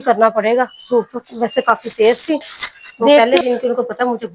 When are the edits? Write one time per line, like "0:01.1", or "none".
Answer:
0:03.2